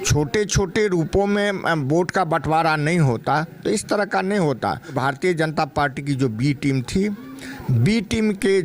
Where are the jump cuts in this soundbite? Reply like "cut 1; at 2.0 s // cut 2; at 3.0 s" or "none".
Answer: cut 1; at 5.0 s